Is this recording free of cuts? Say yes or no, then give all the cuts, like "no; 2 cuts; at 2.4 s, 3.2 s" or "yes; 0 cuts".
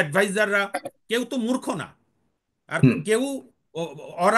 no; 1 cut; at 1.0 s